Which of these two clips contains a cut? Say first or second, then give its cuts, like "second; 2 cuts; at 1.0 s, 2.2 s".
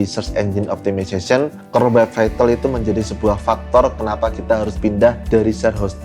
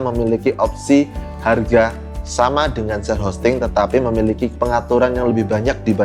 second; 1 cut; at 4.6 s